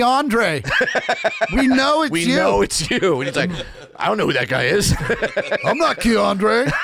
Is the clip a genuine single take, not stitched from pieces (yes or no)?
yes